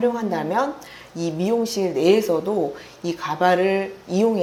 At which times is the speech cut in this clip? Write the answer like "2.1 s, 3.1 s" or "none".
none